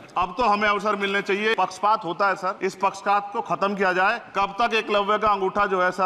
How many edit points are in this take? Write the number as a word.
three